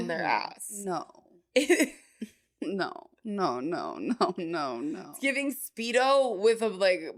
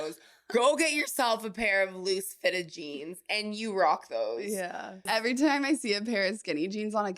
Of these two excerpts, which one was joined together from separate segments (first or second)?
second